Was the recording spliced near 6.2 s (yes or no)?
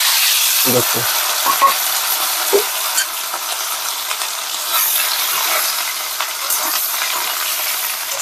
no